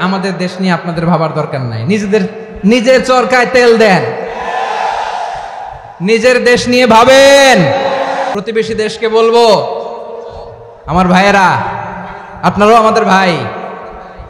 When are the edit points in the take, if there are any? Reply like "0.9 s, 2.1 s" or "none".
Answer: 8.3 s